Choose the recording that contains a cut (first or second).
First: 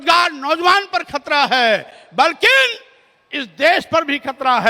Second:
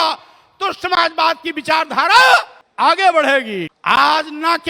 second